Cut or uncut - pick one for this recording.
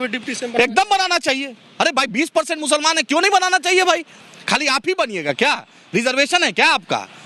uncut